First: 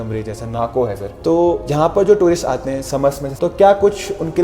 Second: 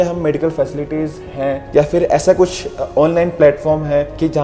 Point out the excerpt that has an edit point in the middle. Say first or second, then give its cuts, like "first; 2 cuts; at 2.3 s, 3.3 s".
first; 1 cut; at 3.3 s